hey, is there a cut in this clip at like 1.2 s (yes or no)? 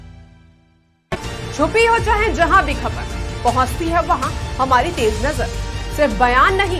yes